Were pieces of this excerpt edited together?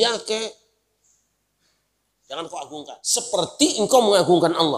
yes; 1 cut; at 3.0 s

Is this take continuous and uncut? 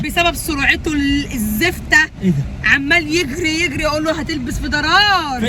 yes; 0 cuts

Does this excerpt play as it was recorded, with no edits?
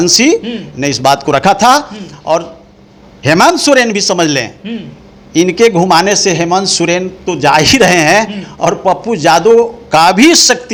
yes; 0 cuts

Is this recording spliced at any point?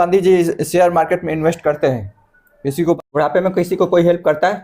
yes; 1 cut; at 3.0 s

